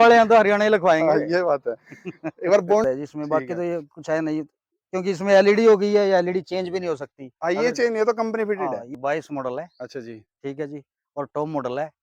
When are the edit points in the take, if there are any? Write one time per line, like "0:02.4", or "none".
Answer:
0:02.8
0:08.9